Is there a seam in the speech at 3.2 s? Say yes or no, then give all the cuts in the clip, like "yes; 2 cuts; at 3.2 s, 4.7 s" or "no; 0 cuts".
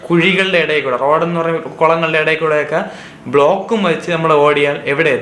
no; 0 cuts